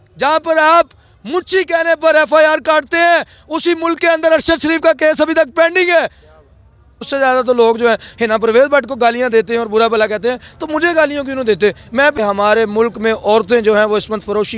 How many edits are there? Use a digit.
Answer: 2